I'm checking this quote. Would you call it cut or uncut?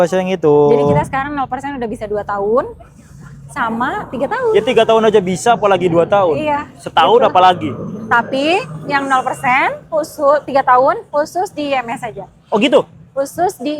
uncut